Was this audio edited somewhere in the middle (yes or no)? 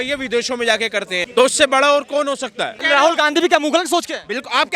yes